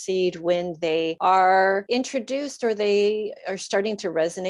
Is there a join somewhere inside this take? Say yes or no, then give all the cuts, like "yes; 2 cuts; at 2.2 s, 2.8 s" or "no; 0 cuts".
yes; 2 cuts; at 1.1 s, 1.8 s